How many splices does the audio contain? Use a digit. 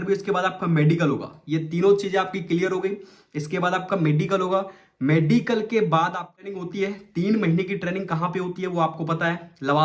1